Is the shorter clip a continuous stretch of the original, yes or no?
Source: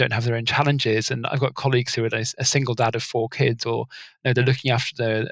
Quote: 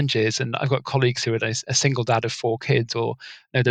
yes